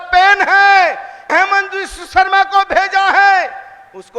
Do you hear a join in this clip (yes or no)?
yes